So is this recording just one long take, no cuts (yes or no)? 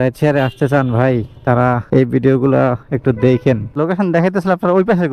no